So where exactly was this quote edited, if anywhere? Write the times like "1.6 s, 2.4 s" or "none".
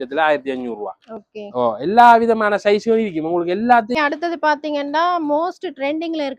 4.0 s